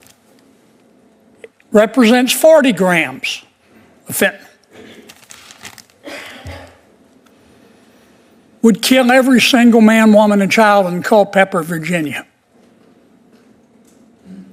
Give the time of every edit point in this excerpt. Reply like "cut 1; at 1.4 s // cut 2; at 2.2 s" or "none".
none